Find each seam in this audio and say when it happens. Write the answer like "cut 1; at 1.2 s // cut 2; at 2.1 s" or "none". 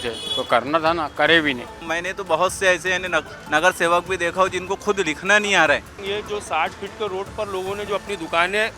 cut 1; at 1.9 s // cut 2; at 5.9 s